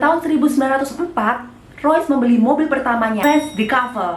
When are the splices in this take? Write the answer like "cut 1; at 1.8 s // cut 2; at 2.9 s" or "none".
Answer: cut 1; at 3.2 s